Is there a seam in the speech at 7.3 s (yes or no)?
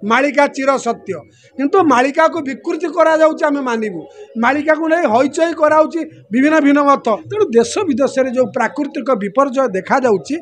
yes